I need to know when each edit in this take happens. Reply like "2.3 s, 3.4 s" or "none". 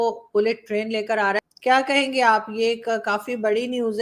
1.4 s